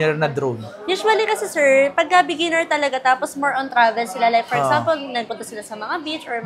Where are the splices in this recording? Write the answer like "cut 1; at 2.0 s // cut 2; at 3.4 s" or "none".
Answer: none